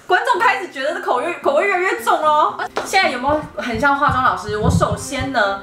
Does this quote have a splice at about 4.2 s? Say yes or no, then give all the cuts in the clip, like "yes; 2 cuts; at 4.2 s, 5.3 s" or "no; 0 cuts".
no; 1 cut; at 2.5 s